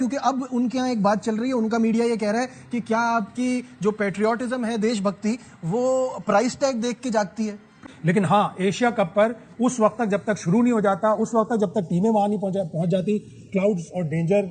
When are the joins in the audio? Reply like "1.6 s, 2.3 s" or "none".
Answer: 7.8 s